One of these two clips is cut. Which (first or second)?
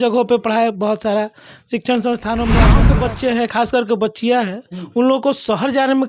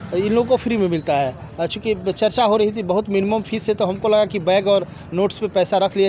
first